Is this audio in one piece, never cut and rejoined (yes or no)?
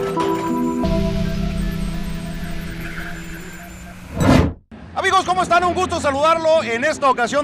yes